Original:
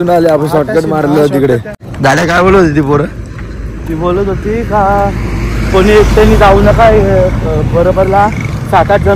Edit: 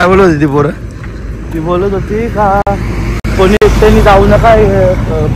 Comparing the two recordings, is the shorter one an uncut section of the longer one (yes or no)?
yes